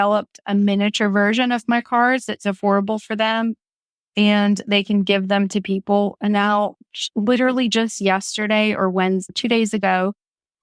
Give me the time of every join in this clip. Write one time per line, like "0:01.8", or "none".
none